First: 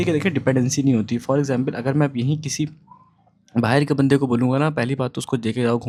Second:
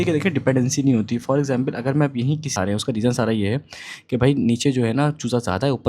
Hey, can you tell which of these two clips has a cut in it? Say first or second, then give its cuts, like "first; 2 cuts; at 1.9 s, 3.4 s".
second; 1 cut; at 2.5 s